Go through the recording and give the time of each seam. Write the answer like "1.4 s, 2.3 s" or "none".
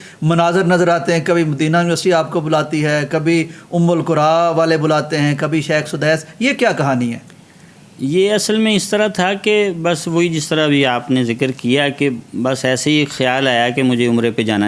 none